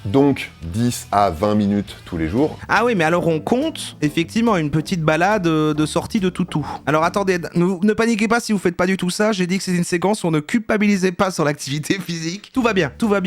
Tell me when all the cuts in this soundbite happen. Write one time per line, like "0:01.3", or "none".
0:02.6